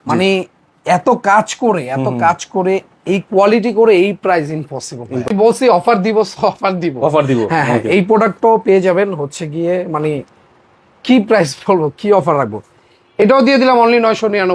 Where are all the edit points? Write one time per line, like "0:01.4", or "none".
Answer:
0:05.3